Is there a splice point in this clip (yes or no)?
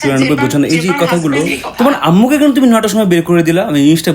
yes